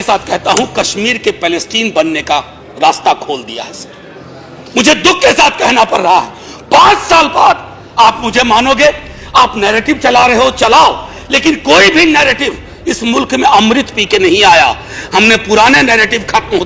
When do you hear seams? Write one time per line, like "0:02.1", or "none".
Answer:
none

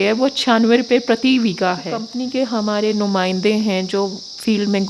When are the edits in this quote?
0:02.1

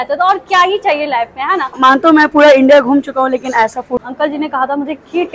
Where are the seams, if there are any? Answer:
0:01.8
0:04.0

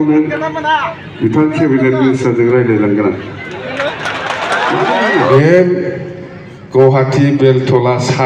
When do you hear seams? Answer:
0:05.3

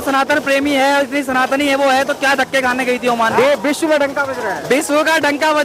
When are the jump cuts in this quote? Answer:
0:03.3

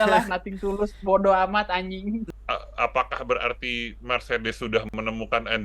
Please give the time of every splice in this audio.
0:02.2

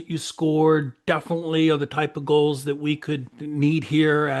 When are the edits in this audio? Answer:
0:03.4

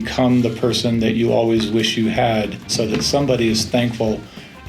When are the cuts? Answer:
0:02.7

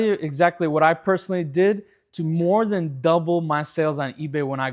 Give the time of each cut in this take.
none

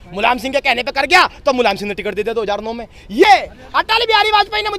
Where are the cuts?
0:03.2

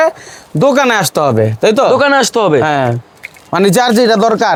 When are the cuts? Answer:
none

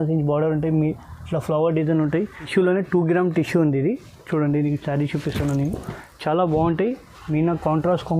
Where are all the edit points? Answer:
0:02.4

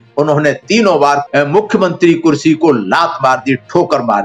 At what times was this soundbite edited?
0:01.2

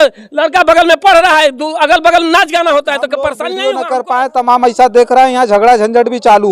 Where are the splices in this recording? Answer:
0:03.5

